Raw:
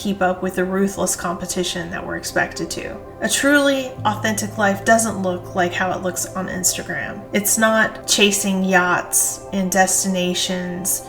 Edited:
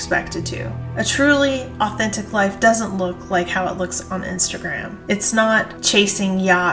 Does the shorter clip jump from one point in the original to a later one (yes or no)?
no